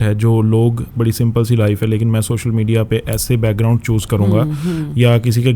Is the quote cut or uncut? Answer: cut